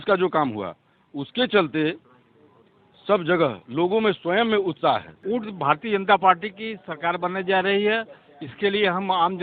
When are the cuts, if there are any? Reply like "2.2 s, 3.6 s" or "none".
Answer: 5.1 s